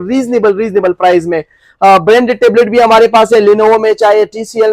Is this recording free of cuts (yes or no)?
yes